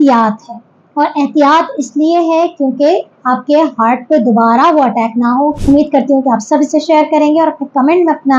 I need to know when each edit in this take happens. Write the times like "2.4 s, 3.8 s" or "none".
5.6 s